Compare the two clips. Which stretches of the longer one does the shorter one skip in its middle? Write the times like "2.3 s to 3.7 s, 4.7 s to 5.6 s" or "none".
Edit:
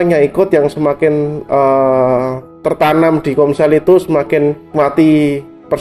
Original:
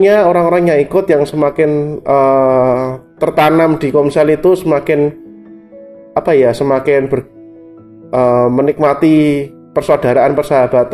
5.3 s to 8.8 s